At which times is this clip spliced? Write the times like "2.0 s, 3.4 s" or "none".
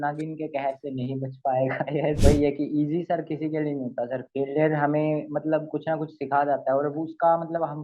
2.2 s